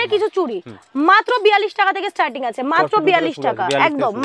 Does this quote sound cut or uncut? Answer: uncut